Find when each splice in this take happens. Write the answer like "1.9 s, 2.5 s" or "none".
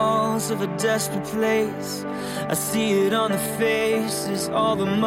none

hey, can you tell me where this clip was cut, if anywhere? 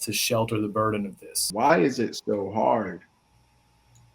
1.4 s

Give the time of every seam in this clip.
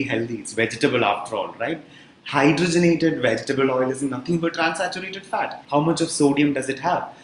5.6 s

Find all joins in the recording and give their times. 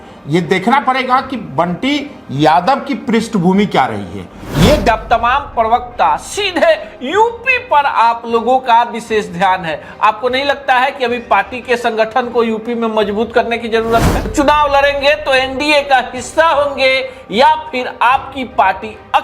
4.9 s, 14.3 s

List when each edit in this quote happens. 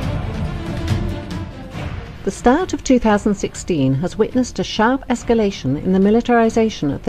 none

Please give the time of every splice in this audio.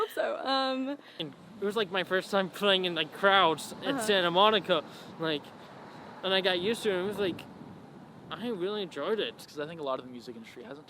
1.2 s, 9.4 s

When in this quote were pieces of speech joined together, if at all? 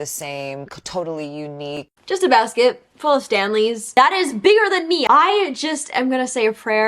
3.8 s, 5.1 s

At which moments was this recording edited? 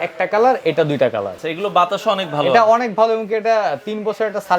1.4 s

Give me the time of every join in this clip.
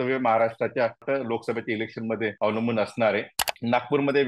1.0 s, 2.3 s, 3.4 s

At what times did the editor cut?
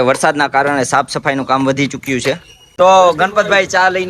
2.5 s

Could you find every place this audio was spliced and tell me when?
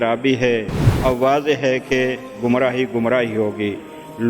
0.9 s

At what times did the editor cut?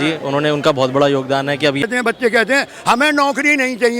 1.8 s

